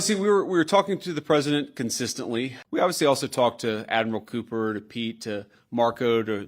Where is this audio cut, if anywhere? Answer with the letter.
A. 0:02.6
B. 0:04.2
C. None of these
A